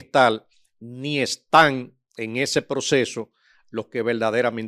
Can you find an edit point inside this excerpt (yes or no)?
no